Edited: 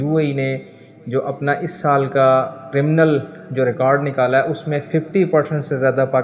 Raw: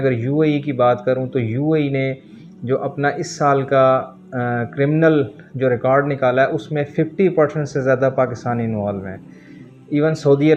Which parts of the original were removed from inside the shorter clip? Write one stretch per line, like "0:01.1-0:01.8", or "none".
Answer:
0:04.2-0:04.7